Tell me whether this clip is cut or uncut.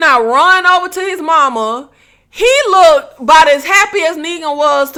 uncut